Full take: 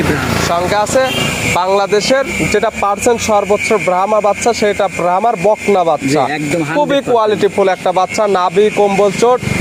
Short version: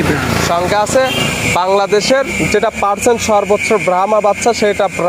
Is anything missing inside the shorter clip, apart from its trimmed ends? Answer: no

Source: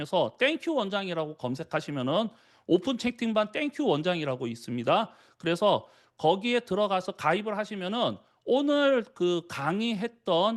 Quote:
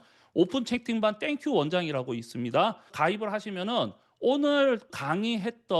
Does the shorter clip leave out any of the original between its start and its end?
yes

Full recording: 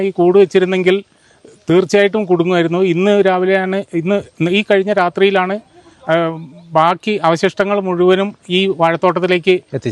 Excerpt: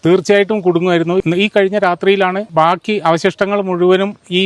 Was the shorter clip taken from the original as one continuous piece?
no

